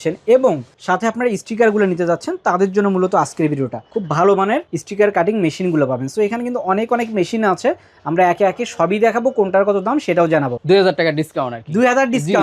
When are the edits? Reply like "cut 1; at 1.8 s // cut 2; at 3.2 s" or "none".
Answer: cut 1; at 3.9 s // cut 2; at 10.6 s